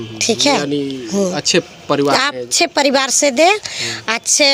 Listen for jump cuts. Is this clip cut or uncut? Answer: uncut